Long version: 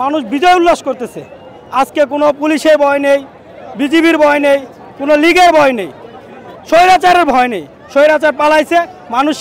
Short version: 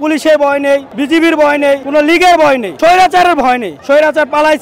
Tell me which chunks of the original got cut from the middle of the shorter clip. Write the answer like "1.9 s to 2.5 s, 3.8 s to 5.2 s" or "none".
3.3 s to 3.7 s, 4.6 s to 5.0 s, 5.8 s to 6.6 s, 7.6 s to 7.8 s